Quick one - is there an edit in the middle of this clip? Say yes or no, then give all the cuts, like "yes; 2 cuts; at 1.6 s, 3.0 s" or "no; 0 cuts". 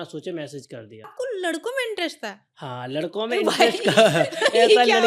yes; 1 cut; at 1.1 s